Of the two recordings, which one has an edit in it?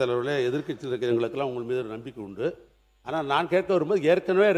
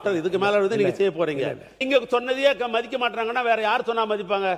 second; 1 cut; at 1.8 s

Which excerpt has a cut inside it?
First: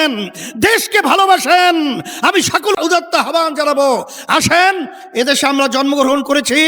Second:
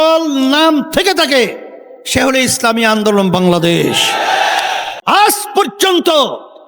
second; 1 cut; at 4.9 s

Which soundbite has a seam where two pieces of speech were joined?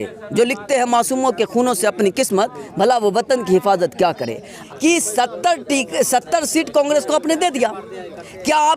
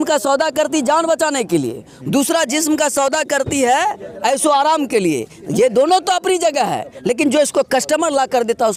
first; 1 cut; at 4.6 s

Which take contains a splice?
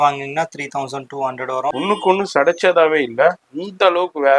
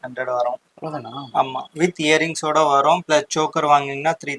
first; 1 cut; at 1.7 s

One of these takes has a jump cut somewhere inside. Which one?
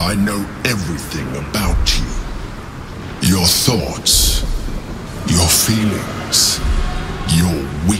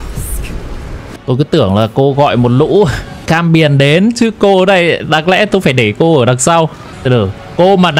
second; 3 cuts; at 1.1 s, 3.2 s, 6.9 s

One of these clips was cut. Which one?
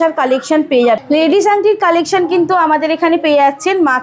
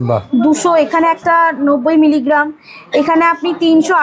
first; 1 cut; at 1.0 s

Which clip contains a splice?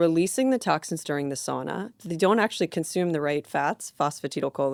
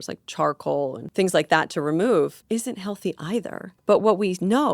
second; 3 cuts; at 1.0 s, 2.4 s, 3.6 s

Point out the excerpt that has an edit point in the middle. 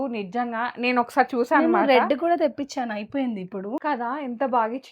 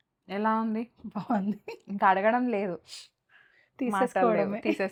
first; 1 cut; at 3.8 s

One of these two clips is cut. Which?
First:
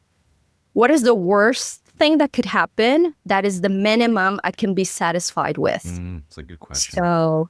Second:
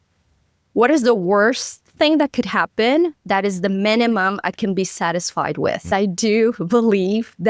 second; 1 cut; at 5.9 s

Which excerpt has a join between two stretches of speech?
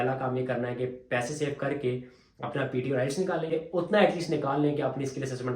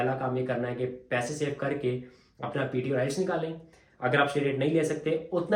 first; 1 cut; at 3.5 s

